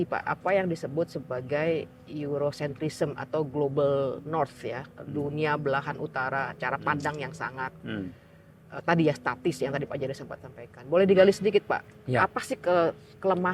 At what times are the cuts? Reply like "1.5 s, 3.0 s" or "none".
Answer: none